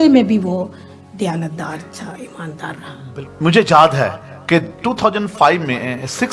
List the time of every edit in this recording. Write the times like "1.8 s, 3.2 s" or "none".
none